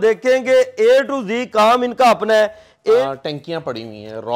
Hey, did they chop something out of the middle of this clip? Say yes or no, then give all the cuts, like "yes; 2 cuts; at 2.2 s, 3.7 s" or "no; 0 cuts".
yes; 1 cut; at 3.0 s